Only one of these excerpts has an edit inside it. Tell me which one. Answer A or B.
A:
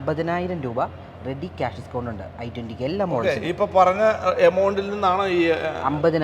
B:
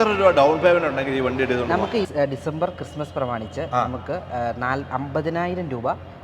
B